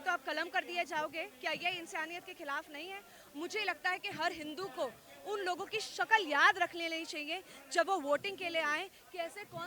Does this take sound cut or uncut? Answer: uncut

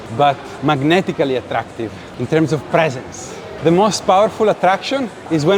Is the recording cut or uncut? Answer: cut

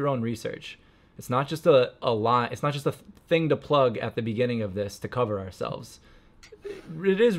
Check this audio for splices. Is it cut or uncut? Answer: uncut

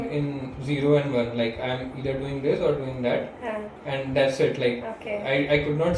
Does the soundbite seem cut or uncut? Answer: uncut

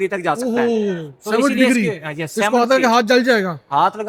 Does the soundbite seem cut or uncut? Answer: uncut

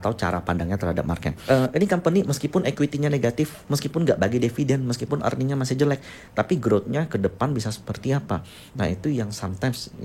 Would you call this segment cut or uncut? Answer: cut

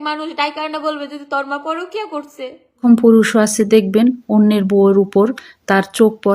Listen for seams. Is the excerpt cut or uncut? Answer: cut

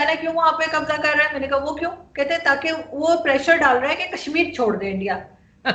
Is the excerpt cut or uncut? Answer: uncut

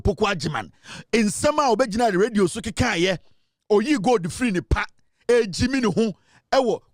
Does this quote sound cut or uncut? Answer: uncut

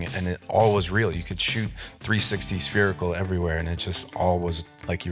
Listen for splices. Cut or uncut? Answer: uncut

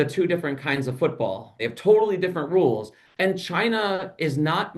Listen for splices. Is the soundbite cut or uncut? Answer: cut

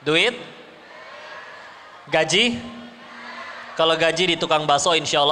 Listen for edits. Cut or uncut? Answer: uncut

